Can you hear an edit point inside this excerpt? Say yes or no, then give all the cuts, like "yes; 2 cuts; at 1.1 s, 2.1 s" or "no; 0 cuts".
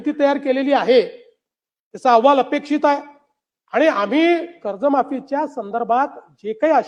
no; 0 cuts